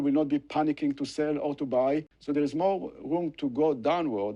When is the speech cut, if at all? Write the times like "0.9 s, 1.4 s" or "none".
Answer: 2.1 s